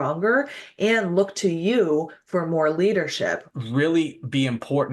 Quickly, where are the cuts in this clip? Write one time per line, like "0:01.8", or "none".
0:03.4